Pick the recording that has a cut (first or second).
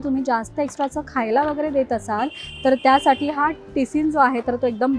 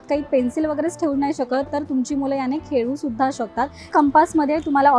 second